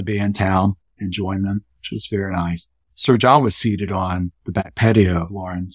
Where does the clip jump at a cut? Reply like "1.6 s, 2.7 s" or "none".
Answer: 0.9 s, 2.9 s